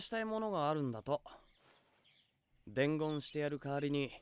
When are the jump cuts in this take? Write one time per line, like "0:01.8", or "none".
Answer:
0:01.3
0:03.5